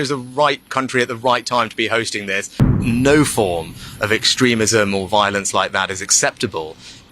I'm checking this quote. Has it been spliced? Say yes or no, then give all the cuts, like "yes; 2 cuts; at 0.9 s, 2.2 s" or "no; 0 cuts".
yes; 1 cut; at 2.8 s